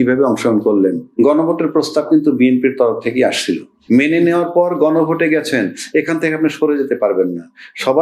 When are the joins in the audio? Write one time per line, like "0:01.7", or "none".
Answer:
0:01.1
0:03.7

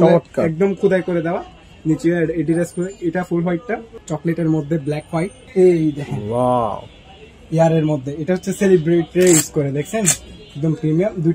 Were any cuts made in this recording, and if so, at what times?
0:03.9
0:05.4

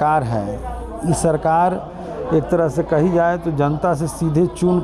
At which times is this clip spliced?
none

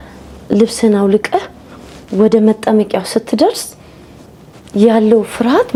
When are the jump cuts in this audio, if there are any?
none

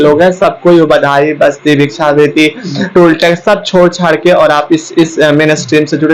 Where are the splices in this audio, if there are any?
none

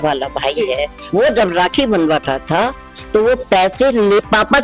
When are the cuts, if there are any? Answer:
0:01.1

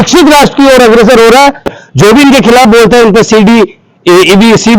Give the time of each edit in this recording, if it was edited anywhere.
0:01.7

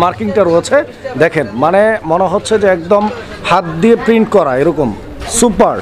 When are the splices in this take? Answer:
none

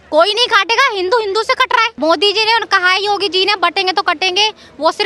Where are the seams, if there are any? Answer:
0:01.9

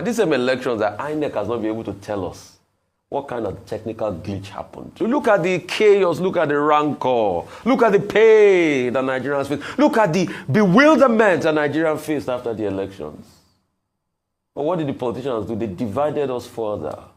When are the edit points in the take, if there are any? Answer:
0:05.0

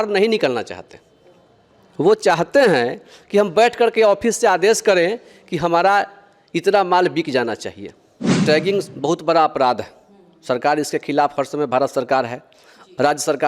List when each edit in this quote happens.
0:08.4

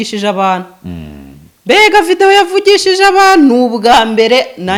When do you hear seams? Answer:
none

